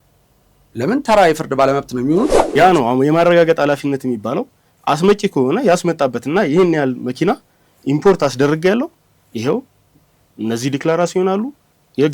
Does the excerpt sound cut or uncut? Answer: cut